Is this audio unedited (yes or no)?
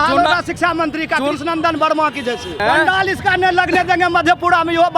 no